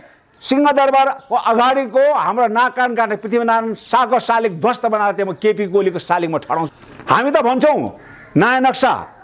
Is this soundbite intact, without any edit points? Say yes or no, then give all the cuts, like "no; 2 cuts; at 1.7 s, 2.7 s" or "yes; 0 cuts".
no; 1 cut; at 6.7 s